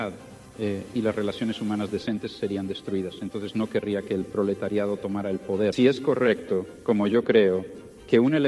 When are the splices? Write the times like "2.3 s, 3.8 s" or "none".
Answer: 5.7 s